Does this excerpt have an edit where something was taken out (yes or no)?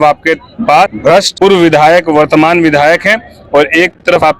no